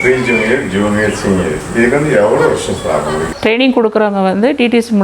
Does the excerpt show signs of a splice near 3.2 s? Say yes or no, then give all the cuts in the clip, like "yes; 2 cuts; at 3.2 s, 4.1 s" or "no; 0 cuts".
yes; 1 cut; at 3.2 s